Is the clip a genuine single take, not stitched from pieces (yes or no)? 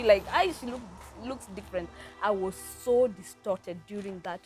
yes